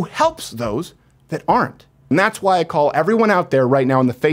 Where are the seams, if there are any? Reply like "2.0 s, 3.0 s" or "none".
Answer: 2.0 s